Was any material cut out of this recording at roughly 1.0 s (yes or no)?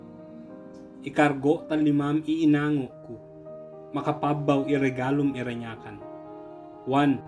yes